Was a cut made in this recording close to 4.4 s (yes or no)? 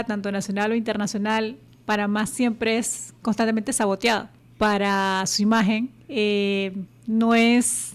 yes